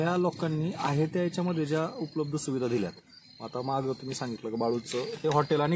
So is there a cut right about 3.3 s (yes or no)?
no